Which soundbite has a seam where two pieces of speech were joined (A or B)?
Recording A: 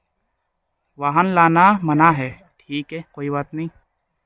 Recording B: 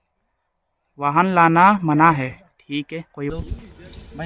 B